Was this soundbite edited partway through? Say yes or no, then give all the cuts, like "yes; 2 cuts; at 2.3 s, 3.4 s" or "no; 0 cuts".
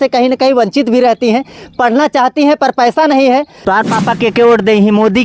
yes; 1 cut; at 3.5 s